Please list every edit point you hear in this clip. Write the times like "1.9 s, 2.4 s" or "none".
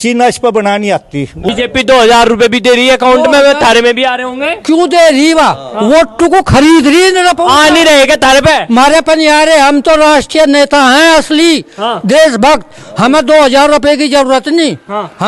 1.4 s